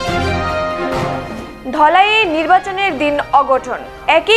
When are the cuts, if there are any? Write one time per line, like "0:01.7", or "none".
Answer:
0:01.1